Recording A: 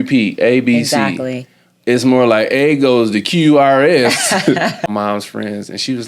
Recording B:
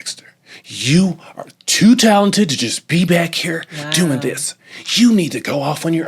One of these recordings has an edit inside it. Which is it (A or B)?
A